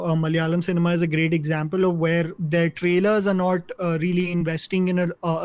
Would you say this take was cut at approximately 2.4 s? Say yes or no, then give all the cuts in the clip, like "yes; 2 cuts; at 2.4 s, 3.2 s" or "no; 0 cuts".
yes; 1 cut; at 2.4 s